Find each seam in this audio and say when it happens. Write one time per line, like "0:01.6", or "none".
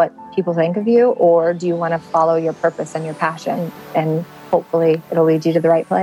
0:04.4

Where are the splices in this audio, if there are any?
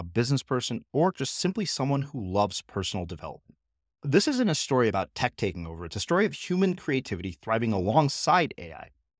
none

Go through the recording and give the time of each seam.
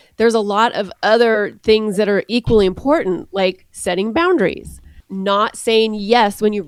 none

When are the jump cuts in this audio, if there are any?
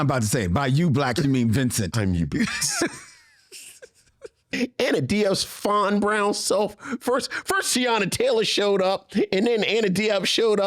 0:04.5

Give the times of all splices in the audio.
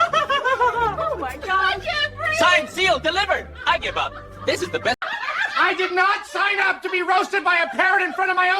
0:05.0

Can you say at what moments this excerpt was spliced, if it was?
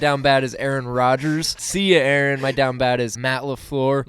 0:01.6
0:03.2

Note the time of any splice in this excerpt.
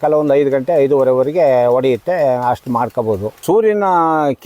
0:03.4

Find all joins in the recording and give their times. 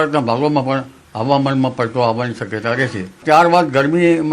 0:03.3

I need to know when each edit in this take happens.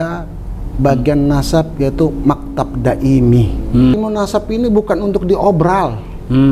0:03.9

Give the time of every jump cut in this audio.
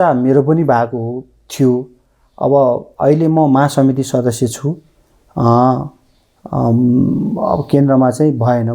none

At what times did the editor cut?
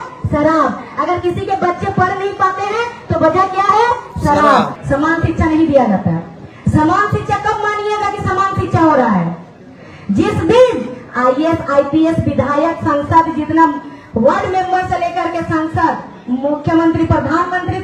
0:04.8

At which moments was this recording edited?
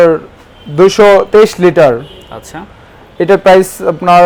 none

